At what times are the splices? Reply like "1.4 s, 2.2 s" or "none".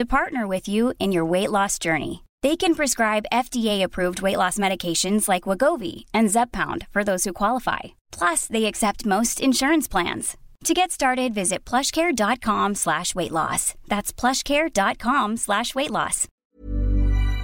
16.3 s